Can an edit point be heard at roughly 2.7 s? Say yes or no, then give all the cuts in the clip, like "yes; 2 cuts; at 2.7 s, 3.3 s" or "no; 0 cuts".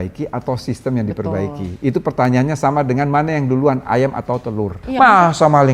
no; 1 cut; at 4.8 s